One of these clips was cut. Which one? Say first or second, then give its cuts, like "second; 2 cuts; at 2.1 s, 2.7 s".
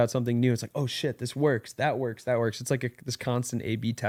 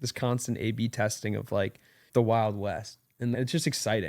second; 2 cuts; at 2.0 s, 3.3 s